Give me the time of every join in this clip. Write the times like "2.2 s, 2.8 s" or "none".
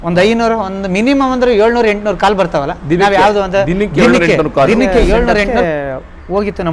5.5 s